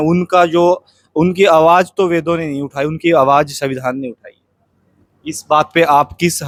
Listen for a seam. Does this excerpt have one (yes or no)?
no